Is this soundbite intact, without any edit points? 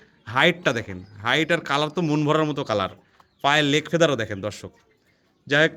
yes; 0 cuts

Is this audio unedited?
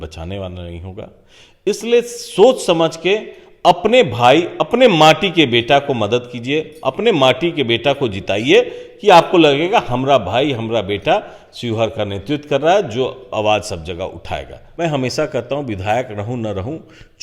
no; 1 cut; at 14.6 s

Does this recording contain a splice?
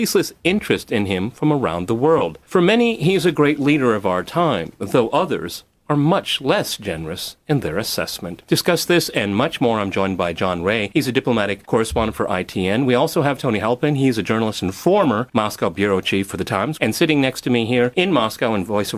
no; 0 cuts

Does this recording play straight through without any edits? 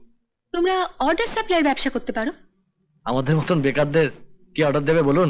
yes; 0 cuts

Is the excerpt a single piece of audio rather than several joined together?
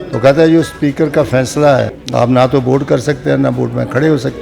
no; 1 cut; at 2.0 s

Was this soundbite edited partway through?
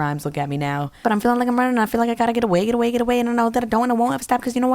yes; 1 cut; at 1.0 s

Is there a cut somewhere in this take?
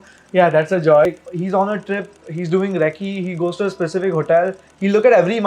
yes; 1 cut; at 1.1 s

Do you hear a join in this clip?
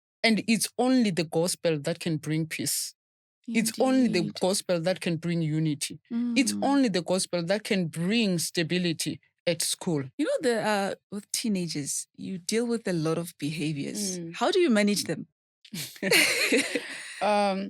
yes; 1 cut; at 10.1 s

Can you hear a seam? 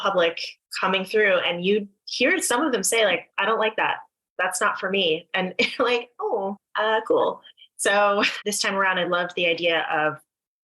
yes; 2 cuts; at 6.6 s, 8.4 s

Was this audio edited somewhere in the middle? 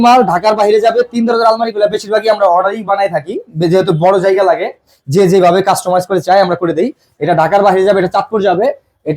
no; 0 cuts

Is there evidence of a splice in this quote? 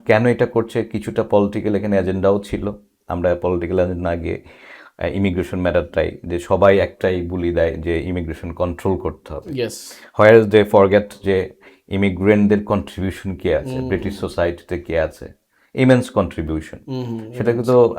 no; 0 cuts

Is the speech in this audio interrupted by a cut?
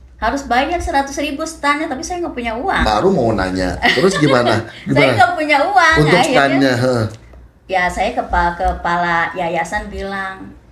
no; 0 cuts

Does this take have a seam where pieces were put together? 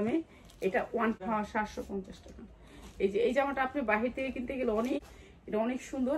yes; 2 cuts; at 1.2 s, 5.0 s

